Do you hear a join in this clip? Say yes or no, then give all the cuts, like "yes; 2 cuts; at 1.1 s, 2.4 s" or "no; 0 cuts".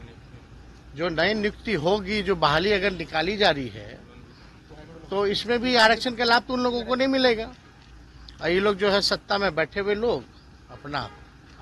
no; 0 cuts